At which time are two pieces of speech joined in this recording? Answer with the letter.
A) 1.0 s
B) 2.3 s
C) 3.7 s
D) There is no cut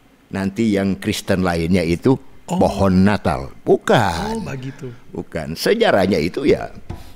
D